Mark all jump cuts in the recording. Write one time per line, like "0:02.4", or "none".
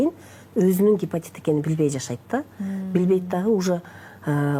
none